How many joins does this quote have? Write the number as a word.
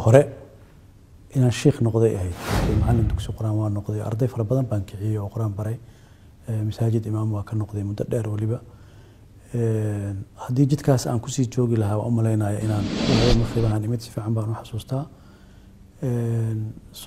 two